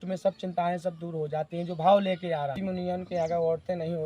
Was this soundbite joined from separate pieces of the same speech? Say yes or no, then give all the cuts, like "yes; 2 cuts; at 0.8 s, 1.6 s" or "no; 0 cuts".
yes; 1 cut; at 2.6 s